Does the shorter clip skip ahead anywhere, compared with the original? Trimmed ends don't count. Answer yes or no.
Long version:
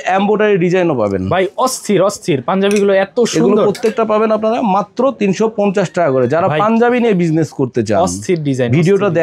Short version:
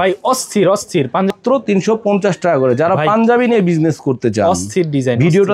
yes